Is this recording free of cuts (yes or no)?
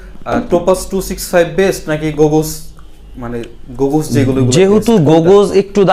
yes